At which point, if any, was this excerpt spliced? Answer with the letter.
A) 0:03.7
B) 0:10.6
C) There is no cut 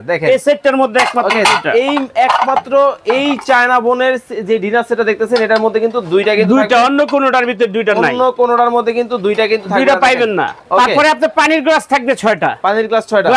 B